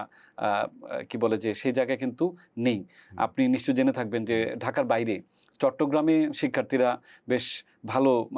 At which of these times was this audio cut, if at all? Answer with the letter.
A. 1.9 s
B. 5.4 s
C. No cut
C